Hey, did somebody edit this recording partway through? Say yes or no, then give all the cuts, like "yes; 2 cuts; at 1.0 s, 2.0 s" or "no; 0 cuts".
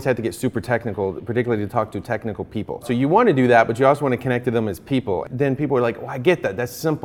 yes; 2 cuts; at 2.9 s, 5.3 s